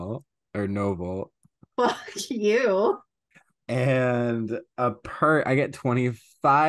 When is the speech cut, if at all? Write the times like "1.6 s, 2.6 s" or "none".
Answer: none